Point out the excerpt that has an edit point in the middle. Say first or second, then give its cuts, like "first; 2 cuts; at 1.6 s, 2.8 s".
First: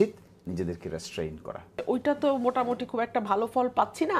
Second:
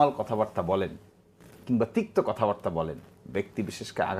first; 1 cut; at 1.8 s